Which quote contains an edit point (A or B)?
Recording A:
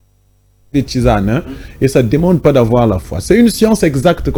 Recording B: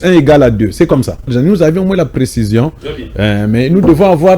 B